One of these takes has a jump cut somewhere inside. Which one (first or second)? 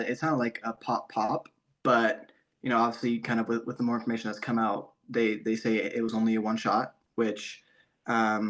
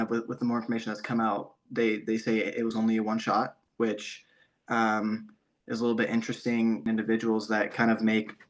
second